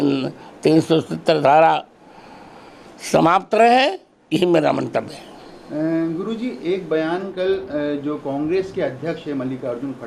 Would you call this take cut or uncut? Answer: uncut